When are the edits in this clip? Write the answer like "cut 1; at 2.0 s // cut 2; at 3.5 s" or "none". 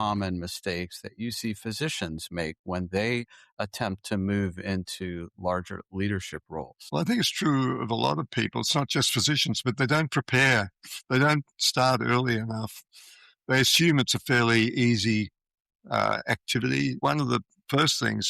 cut 1; at 17.0 s